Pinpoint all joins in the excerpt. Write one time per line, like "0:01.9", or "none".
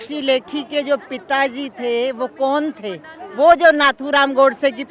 none